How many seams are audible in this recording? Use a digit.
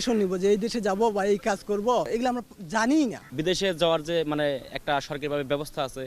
1